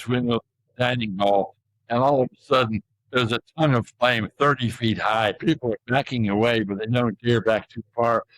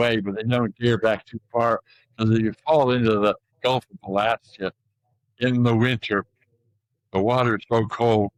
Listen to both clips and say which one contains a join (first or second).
first